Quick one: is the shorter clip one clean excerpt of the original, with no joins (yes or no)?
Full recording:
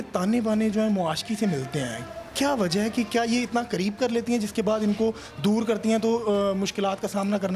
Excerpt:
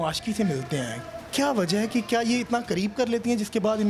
yes